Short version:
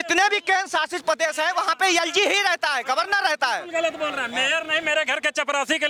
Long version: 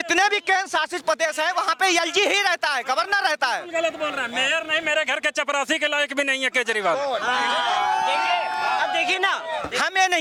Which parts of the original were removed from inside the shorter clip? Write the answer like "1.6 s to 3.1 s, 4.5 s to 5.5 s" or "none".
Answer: none